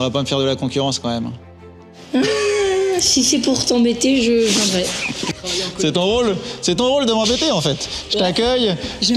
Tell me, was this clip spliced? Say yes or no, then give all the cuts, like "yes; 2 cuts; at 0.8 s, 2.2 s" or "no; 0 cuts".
no; 0 cuts